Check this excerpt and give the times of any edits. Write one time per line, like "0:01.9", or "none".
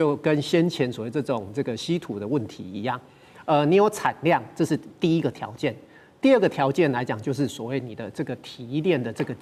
none